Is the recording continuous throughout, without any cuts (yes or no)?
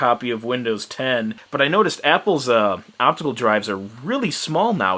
no